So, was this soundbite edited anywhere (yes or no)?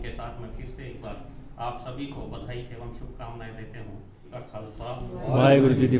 yes